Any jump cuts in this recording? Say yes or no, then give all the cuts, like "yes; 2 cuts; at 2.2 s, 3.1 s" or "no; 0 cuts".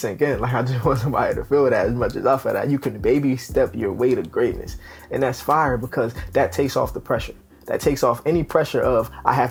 no; 0 cuts